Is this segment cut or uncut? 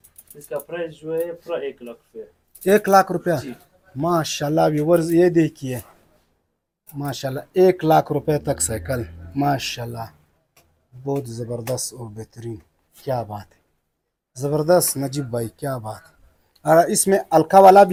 uncut